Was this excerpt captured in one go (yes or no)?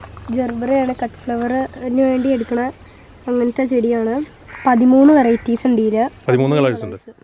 no